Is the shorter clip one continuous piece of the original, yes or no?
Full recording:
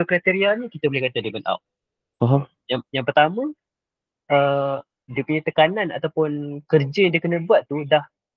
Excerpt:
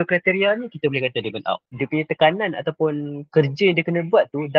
no